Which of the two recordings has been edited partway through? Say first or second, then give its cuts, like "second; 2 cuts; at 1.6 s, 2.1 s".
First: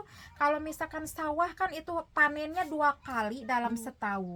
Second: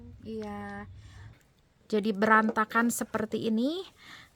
second; 1 cut; at 1.3 s